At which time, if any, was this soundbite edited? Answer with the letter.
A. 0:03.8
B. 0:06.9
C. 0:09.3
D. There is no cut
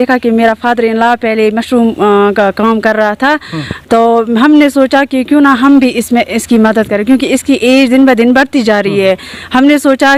D